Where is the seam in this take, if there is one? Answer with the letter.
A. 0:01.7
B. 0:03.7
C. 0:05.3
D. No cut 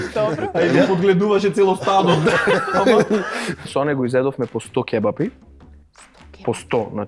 B